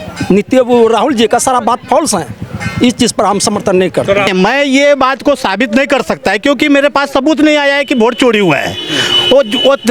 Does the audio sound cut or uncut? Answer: cut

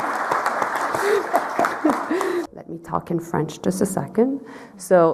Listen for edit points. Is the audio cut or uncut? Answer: cut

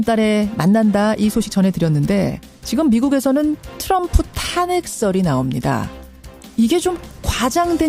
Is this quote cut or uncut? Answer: uncut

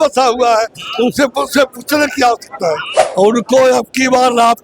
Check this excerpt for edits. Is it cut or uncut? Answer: cut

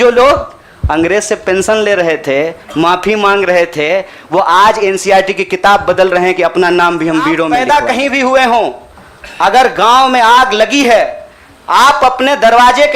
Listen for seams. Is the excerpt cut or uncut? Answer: cut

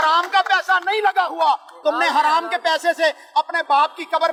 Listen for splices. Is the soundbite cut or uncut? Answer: uncut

